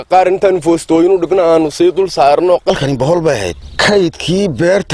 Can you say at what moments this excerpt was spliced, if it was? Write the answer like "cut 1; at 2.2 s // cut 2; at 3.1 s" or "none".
cut 1; at 2.7 s // cut 2; at 3.6 s